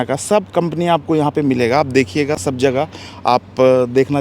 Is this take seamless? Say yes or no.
yes